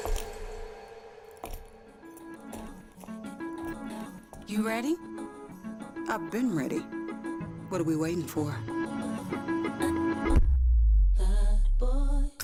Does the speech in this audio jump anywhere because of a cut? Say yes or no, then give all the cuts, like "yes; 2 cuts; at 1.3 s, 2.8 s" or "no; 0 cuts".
no; 0 cuts